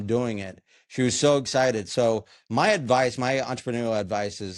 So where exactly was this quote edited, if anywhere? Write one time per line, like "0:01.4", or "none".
none